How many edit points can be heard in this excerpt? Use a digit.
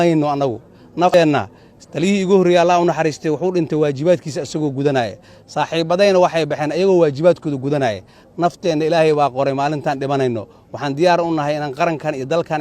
1